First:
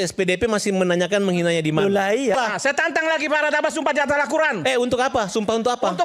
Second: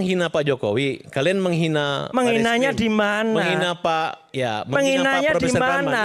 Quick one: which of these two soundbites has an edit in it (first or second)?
first